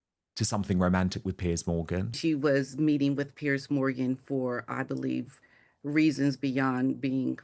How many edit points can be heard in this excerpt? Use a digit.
1